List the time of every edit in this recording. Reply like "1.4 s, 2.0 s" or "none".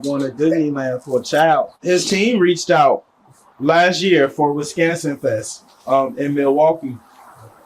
1.8 s